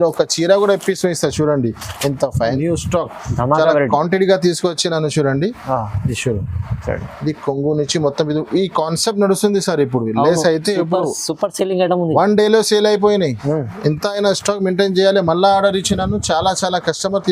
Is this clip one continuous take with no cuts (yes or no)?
no